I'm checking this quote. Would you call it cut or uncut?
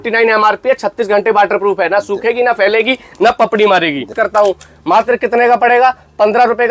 cut